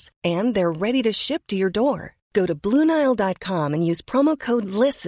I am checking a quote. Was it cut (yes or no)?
no